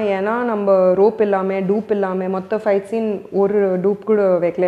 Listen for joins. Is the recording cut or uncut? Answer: uncut